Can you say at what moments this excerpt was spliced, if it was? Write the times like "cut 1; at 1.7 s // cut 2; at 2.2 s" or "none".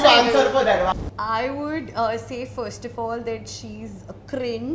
cut 1; at 0.9 s